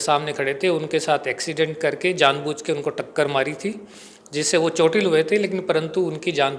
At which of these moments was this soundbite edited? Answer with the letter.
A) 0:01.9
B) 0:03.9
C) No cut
C